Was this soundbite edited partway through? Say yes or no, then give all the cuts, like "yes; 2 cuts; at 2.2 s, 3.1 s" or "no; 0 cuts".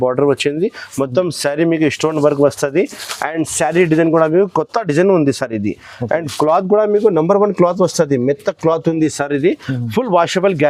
no; 0 cuts